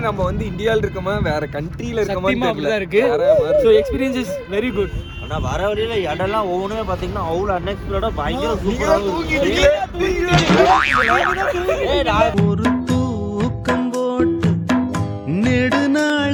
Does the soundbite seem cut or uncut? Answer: uncut